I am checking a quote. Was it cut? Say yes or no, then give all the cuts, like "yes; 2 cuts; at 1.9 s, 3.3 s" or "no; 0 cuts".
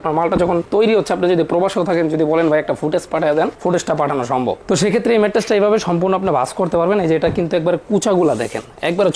no; 0 cuts